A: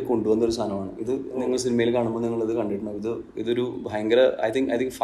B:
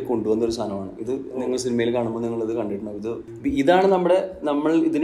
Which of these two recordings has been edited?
B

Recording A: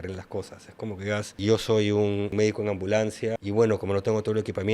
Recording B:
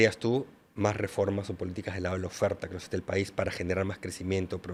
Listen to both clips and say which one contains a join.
A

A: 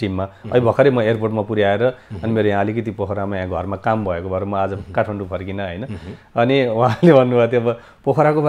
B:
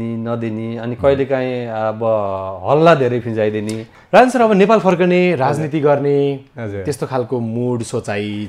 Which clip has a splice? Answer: B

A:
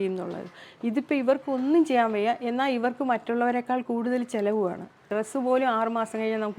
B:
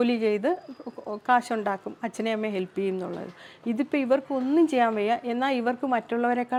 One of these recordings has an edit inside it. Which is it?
A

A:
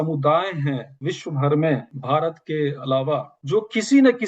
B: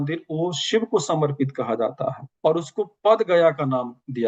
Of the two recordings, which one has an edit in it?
A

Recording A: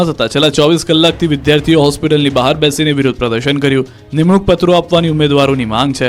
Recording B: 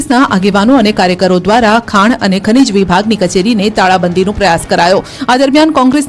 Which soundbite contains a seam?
B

